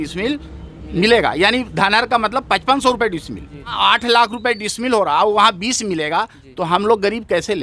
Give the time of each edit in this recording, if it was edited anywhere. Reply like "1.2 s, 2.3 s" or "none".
3.8 s

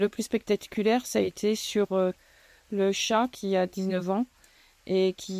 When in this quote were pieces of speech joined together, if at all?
none

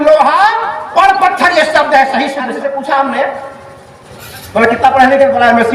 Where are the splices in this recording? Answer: 2.8 s

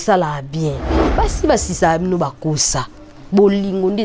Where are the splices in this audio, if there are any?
1.1 s

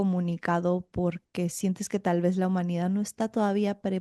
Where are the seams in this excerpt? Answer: none

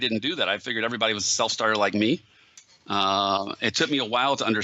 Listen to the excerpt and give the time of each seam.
3.0 s

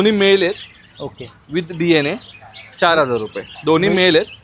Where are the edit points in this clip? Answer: none

